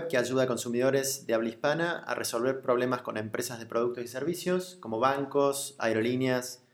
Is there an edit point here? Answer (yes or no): yes